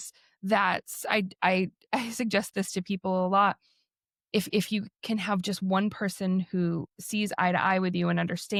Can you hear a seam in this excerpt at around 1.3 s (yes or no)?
no